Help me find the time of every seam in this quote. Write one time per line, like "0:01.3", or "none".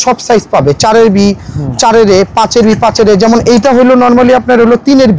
none